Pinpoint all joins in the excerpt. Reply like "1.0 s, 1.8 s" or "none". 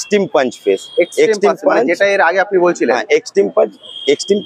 none